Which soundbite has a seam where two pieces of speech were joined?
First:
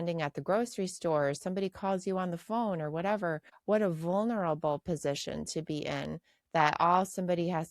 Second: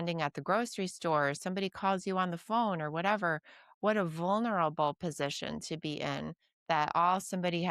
first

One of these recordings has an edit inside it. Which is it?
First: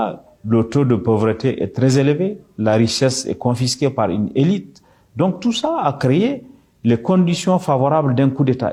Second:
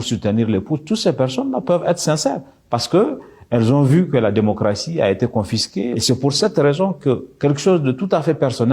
second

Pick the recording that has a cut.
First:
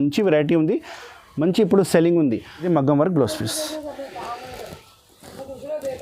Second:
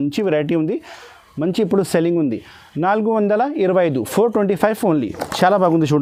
first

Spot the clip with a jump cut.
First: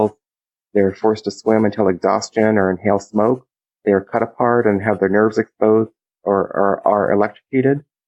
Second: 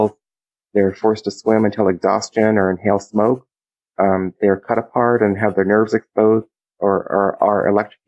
first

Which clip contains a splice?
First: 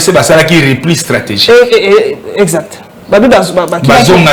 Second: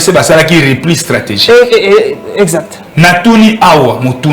second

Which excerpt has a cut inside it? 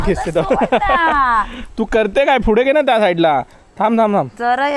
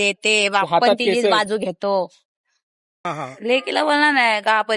second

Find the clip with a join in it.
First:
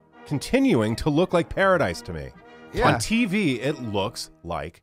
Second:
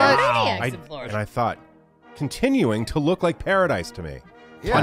second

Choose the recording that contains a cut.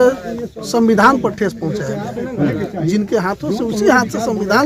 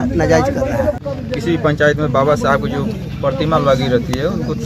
second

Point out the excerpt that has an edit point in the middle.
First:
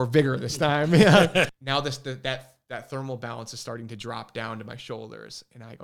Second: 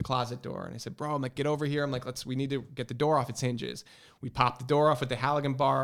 first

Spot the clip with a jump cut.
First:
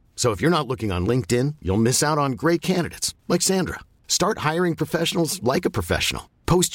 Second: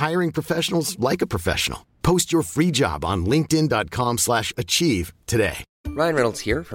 second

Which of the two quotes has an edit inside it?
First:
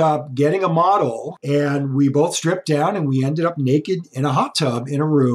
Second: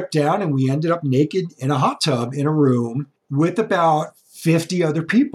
first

